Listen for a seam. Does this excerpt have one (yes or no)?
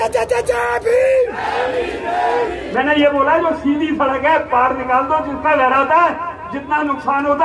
yes